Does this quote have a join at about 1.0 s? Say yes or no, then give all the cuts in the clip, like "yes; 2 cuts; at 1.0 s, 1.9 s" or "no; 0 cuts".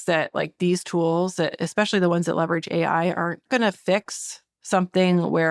no; 1 cut; at 3.4 s